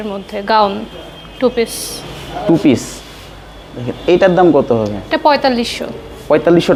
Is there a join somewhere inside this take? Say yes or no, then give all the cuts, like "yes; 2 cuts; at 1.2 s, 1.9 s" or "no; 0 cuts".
no; 0 cuts